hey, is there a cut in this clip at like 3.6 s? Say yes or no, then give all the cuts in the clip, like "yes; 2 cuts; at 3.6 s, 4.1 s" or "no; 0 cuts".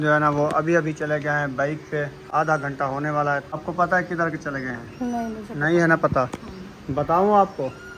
yes; 1 cut; at 3.6 s